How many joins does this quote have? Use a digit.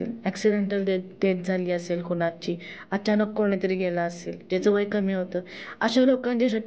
0